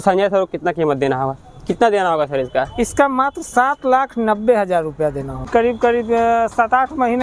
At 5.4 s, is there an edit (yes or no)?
yes